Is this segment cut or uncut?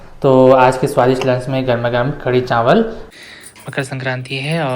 cut